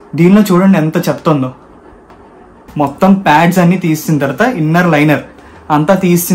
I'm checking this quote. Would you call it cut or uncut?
cut